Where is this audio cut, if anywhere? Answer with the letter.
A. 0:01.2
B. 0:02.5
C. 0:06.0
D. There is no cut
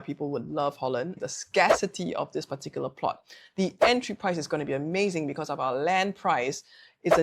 A